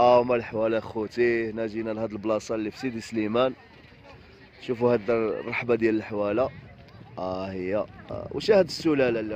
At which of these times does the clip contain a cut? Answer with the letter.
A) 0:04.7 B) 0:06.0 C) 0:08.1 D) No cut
C